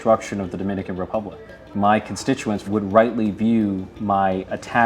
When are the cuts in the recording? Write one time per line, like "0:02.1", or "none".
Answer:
0:01.7
0:02.6
0:03.9